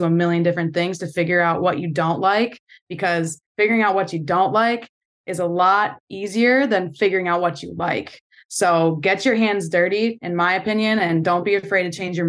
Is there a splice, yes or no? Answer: no